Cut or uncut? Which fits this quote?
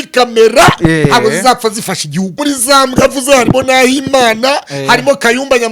cut